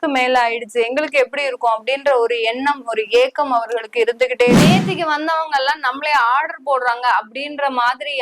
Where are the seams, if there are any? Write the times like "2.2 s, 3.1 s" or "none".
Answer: 4.7 s